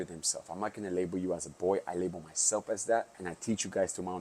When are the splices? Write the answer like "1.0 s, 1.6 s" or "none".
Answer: 3.2 s